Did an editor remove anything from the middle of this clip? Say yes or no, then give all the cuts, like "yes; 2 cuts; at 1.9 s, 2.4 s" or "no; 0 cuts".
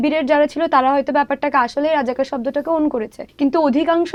no; 0 cuts